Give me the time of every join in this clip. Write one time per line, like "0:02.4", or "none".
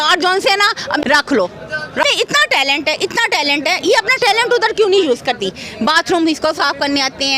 0:01.0
0:02.0